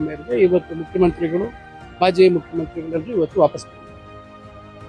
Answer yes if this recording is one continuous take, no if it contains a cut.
no